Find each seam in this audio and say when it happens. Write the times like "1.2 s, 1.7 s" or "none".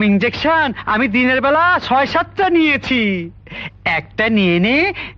none